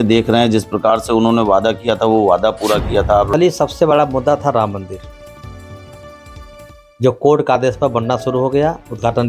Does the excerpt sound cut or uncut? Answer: cut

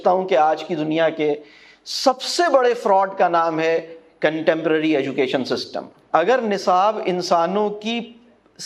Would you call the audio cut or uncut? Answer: cut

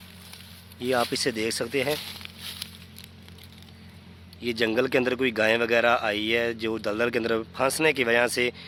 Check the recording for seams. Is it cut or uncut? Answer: uncut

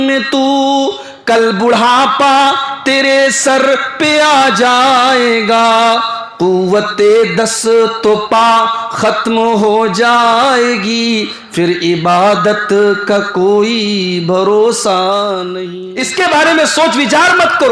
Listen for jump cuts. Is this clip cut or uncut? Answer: cut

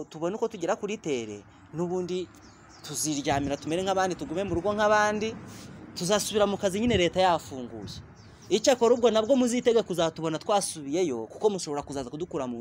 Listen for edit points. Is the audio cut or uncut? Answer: uncut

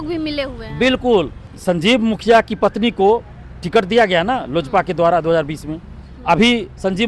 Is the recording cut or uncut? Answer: cut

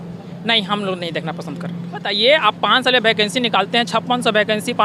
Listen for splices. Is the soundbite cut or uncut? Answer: cut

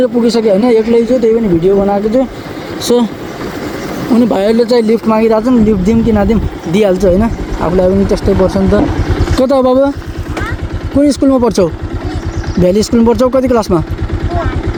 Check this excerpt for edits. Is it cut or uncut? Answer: uncut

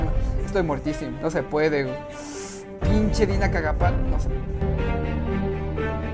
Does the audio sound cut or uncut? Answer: uncut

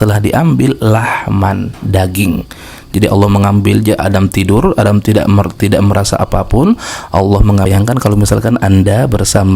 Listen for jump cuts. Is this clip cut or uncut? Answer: cut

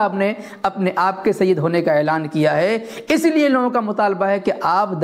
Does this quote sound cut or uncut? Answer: uncut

